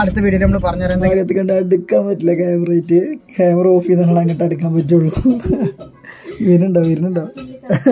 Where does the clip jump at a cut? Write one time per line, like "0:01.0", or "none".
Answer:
0:01.1